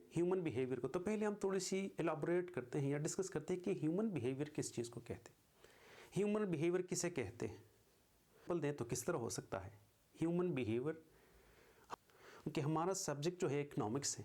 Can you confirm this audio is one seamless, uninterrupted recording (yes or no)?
no